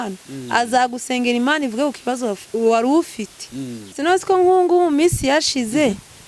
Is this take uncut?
no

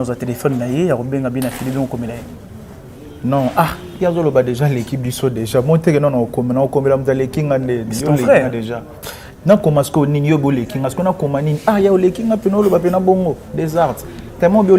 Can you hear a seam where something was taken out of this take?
no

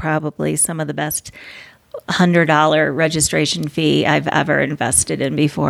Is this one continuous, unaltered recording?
yes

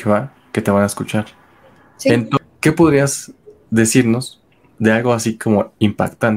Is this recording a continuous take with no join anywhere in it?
no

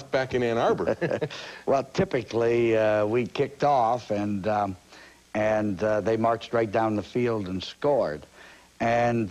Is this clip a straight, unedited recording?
no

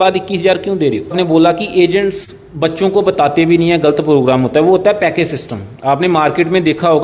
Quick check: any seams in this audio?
yes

